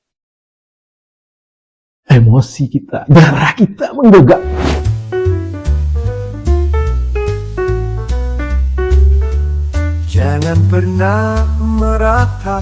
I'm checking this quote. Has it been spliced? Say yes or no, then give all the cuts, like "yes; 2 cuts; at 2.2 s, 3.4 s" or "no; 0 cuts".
yes; 1 cut; at 4.5 s